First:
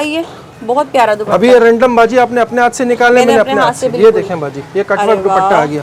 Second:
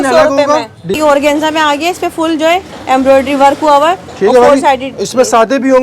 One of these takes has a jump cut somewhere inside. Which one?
second; 1 cut; at 1.0 s

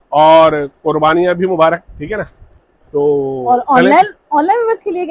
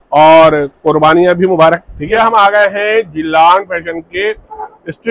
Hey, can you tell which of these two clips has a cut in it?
second; 1 cut; at 2.0 s

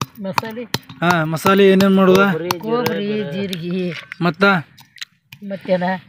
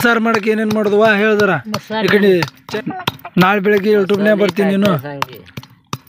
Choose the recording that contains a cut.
second; 1 cut; at 2.6 s

